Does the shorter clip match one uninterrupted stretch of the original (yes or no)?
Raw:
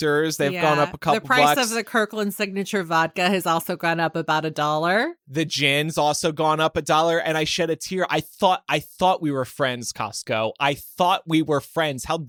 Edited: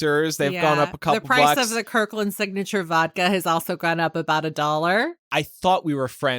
no